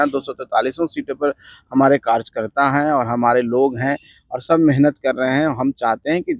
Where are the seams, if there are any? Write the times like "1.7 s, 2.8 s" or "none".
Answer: none